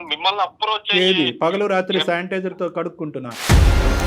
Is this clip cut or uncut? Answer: uncut